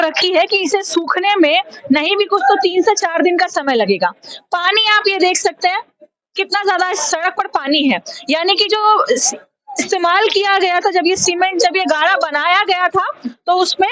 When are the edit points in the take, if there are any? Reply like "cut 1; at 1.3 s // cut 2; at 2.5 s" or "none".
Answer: none